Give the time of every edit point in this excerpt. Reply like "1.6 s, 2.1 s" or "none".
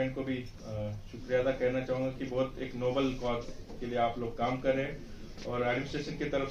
none